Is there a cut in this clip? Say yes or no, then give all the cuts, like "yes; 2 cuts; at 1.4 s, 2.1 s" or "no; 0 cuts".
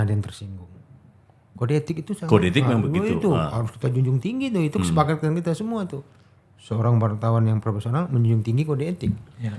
no; 0 cuts